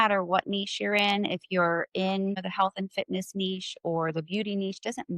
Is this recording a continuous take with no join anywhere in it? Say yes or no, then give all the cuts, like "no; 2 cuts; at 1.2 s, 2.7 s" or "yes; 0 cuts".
no; 1 cut; at 2.4 s